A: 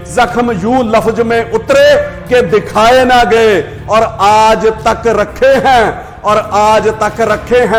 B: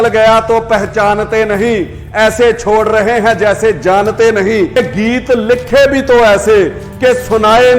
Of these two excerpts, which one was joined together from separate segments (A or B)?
B